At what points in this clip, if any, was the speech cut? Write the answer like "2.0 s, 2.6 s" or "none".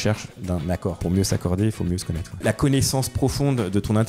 2.4 s